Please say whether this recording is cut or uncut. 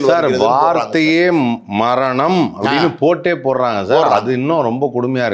uncut